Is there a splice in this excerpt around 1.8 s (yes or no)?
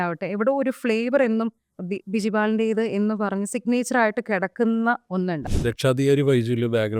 no